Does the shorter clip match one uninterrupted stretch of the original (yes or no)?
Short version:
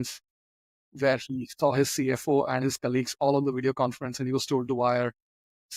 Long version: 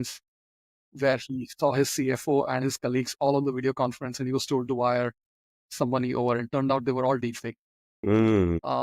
yes